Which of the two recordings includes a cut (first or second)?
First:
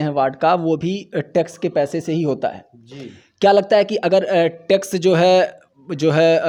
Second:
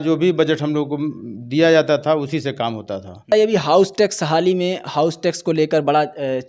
second